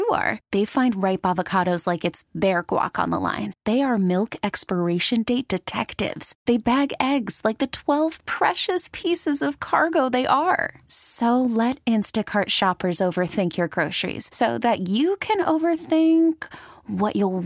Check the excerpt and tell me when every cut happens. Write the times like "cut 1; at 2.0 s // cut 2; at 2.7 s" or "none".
none